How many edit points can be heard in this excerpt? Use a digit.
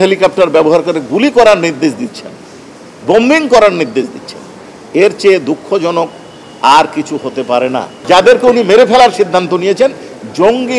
1